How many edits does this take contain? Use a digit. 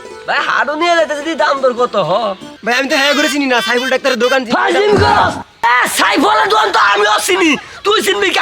1